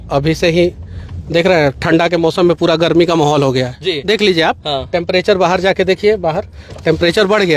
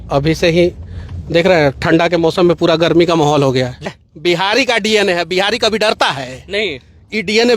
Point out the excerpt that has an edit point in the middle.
second; 1 cut; at 3.9 s

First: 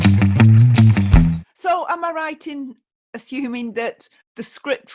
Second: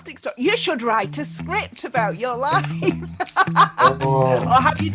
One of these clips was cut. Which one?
first; 1 cut; at 1.5 s

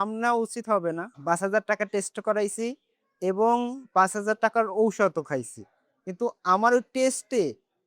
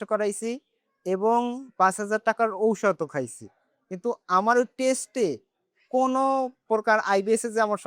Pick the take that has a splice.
first; 1 cut; at 1.1 s

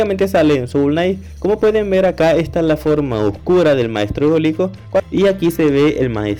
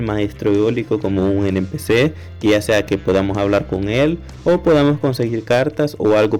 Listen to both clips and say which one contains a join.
first; 1 cut; at 5.0 s

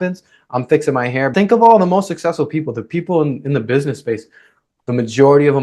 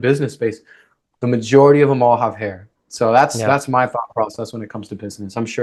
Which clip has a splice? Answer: first; 1 cut; at 1.3 s

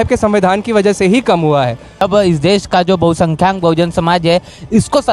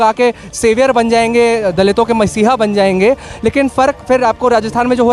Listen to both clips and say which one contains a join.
first; 1 cut; at 2.1 s

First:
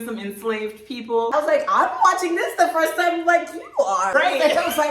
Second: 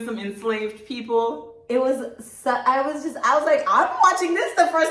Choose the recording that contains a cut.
first; 2 cuts; at 1.3 s, 4.1 s

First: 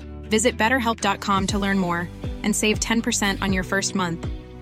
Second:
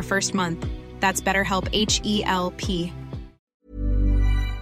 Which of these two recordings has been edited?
second; 1 cut; at 3.4 s

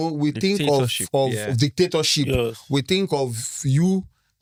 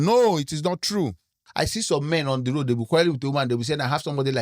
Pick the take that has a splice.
second; 1 cut; at 1.4 s

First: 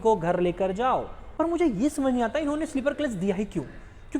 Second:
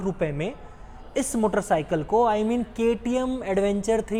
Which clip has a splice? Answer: first; 1 cut; at 1.2 s

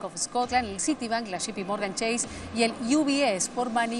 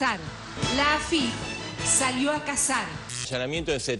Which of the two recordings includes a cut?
second; 1 cut; at 3.1 s

